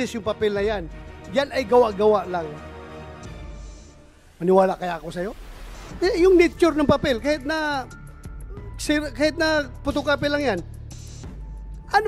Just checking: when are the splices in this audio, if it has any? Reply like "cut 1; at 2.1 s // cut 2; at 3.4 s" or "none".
none